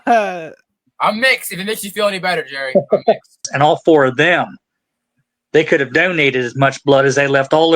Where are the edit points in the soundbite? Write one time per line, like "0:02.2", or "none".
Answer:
0:03.4